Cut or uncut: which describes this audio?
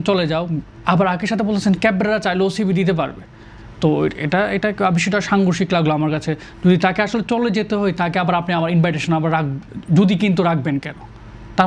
uncut